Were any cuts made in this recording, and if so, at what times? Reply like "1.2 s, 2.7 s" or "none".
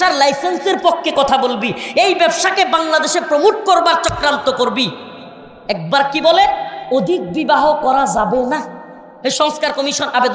none